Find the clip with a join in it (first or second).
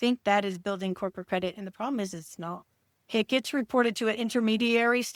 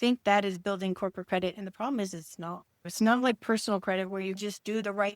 second